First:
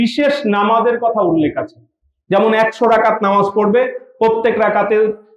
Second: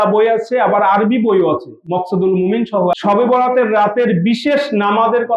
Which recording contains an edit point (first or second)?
second